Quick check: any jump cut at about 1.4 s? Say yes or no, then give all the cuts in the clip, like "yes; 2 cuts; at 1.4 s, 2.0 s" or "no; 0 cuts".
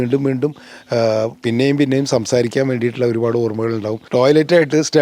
no; 1 cut; at 4.0 s